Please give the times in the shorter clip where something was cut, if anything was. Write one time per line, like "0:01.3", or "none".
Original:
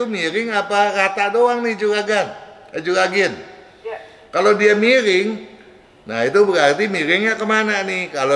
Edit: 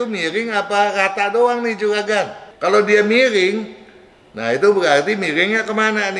0:02.4